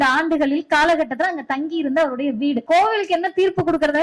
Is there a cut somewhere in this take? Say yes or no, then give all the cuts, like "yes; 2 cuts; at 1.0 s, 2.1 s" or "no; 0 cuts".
yes; 1 cut; at 2.6 s